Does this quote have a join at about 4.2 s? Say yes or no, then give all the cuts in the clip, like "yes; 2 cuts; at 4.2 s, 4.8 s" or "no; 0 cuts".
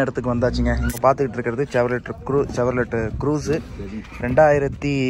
no; 1 cut; at 0.9 s